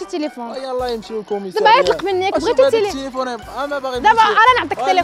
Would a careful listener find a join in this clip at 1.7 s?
no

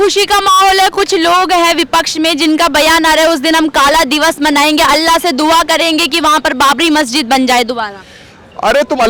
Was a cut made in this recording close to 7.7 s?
no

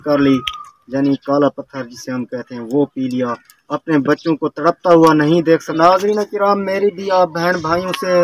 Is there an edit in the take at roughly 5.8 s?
yes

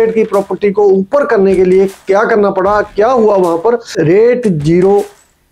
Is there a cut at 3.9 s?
yes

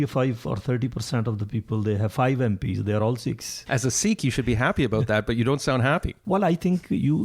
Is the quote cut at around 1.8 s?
no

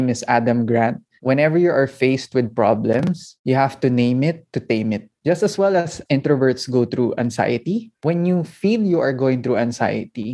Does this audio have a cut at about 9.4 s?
no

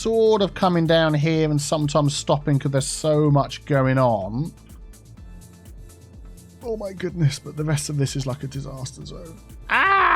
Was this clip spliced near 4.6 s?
no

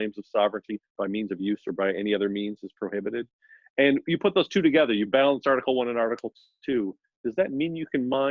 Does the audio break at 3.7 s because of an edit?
no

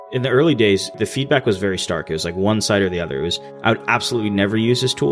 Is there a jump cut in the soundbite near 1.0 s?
yes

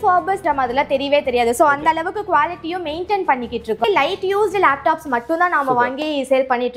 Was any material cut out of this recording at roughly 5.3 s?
no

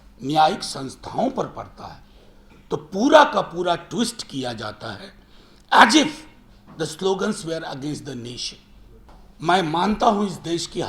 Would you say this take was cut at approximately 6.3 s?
no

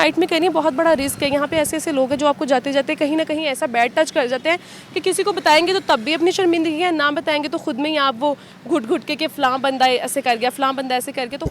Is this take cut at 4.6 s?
no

